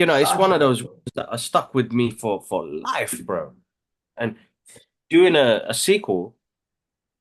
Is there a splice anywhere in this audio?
no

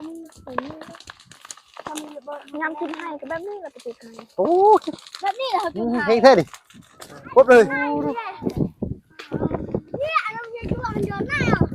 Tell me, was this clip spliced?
yes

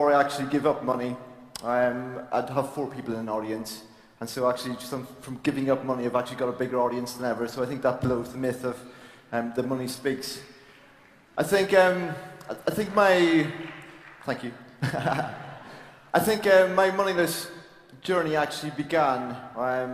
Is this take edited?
no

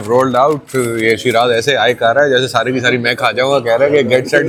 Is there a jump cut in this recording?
no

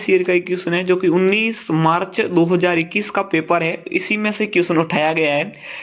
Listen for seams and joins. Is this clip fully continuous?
yes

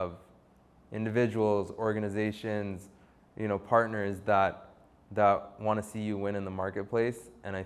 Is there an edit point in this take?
no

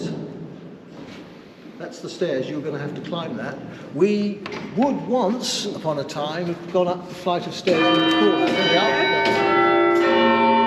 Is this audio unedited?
yes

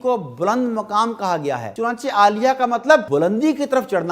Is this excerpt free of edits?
no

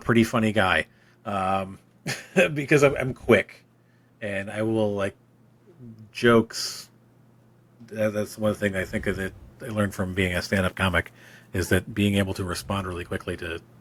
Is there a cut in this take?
no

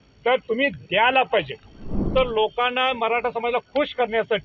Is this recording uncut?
no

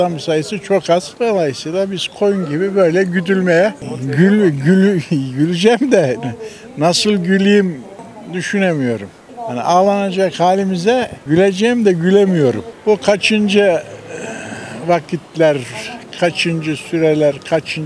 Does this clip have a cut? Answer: no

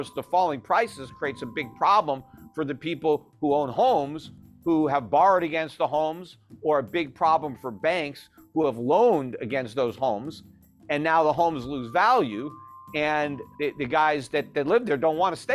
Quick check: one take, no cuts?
no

